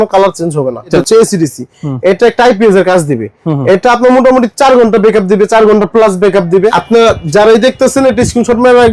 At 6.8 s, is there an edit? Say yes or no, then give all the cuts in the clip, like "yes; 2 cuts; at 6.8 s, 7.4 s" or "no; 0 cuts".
yes; 2 cuts; at 1.0 s, 6.8 s